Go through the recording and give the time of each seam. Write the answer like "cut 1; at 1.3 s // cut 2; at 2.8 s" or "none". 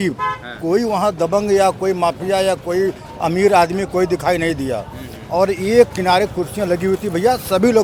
none